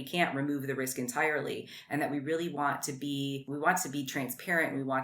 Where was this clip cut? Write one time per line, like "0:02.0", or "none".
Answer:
0:03.4